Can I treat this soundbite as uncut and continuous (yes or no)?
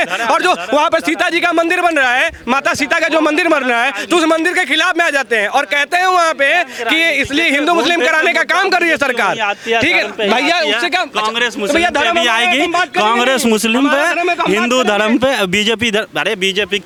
yes